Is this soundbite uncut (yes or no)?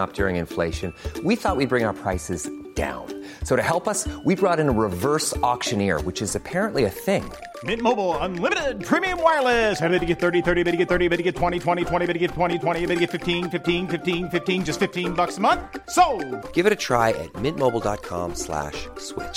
yes